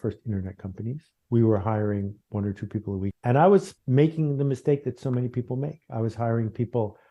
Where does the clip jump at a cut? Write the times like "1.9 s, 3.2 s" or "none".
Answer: 1.1 s, 3.2 s, 3.8 s